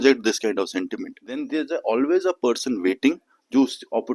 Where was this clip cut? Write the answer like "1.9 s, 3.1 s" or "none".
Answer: 1.4 s